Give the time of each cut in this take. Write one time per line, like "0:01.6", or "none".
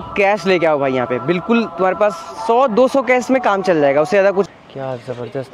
0:04.5